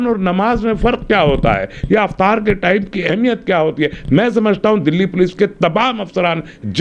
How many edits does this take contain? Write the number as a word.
zero